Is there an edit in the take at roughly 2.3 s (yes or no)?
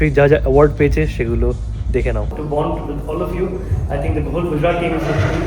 yes